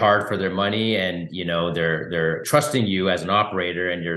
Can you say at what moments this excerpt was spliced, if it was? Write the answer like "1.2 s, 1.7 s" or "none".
none